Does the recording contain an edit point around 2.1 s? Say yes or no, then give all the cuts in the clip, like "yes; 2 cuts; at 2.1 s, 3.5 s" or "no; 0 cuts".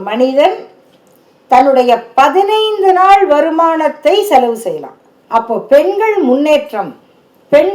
no; 1 cut; at 5.1 s